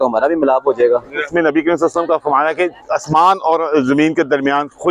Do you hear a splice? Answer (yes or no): yes